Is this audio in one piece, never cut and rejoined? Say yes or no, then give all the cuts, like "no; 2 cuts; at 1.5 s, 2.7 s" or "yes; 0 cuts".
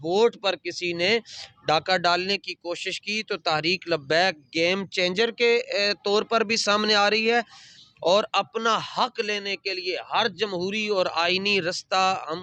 yes; 0 cuts